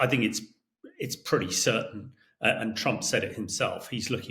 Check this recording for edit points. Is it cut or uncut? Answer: uncut